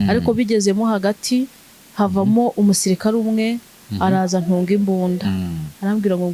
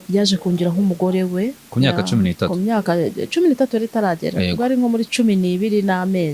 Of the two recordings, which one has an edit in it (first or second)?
second